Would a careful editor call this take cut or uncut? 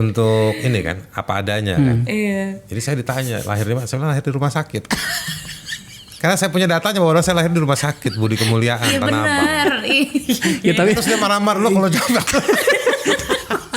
uncut